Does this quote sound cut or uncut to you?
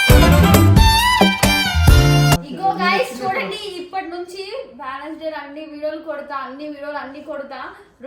cut